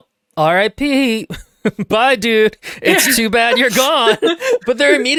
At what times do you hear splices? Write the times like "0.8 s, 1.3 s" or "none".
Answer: none